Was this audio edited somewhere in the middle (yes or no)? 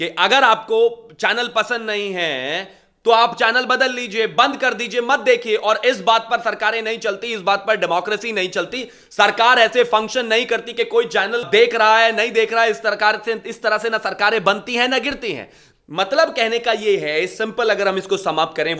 no